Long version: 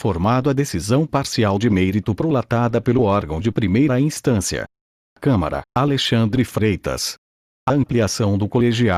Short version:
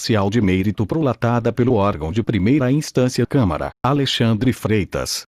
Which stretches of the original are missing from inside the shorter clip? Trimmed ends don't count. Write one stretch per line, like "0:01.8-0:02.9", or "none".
0:04.2-0:04.8